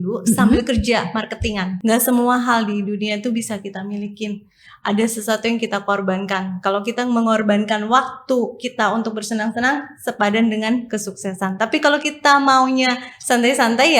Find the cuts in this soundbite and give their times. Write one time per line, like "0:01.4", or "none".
0:01.7